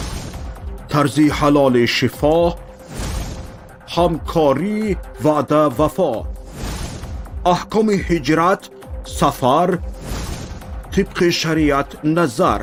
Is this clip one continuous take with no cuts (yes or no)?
yes